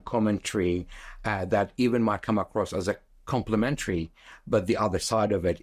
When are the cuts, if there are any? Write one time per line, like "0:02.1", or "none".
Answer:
none